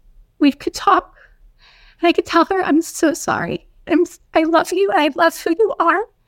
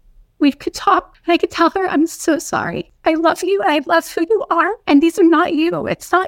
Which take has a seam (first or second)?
second